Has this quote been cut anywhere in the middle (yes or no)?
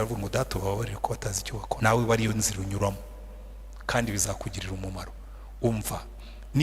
yes